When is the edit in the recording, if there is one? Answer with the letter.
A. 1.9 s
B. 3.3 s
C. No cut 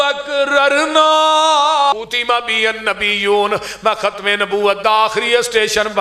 A